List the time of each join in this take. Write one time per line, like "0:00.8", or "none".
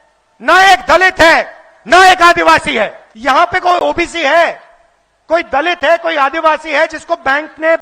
0:03.1